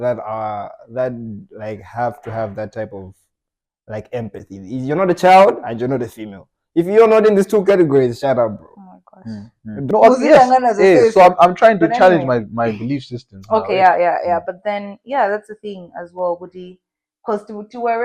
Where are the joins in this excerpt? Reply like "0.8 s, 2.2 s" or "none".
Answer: 9.8 s